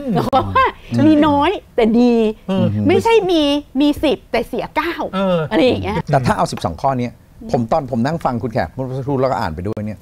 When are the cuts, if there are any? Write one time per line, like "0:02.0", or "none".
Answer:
0:06.0